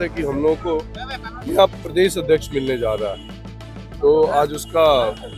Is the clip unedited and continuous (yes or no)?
yes